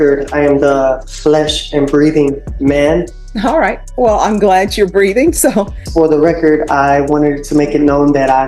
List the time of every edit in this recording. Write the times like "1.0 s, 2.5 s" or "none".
3.2 s, 5.8 s